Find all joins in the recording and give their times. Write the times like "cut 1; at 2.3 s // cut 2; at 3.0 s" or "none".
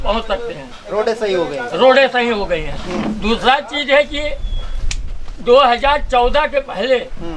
none